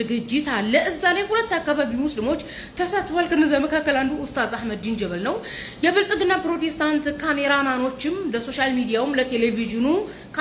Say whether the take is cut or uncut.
uncut